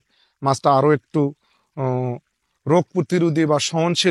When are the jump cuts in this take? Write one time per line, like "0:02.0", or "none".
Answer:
none